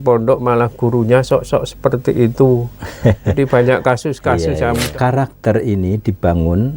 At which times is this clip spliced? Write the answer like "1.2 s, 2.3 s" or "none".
4.9 s